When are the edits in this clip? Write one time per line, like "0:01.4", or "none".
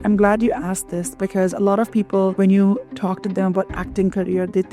0:02.3